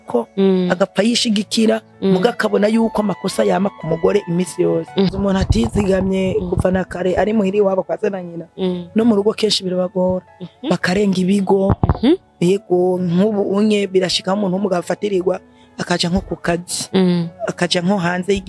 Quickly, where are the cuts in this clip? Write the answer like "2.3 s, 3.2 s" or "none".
5.1 s